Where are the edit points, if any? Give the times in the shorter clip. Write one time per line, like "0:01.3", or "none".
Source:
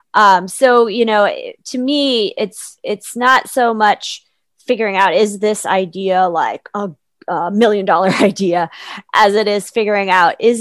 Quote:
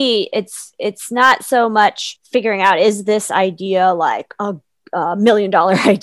0:02.1